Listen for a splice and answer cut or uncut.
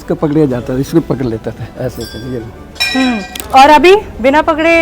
cut